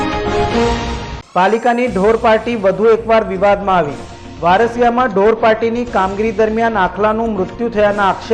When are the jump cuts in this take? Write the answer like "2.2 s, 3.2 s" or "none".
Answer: 1.1 s